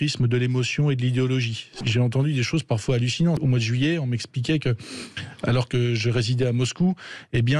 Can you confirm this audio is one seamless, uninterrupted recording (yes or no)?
no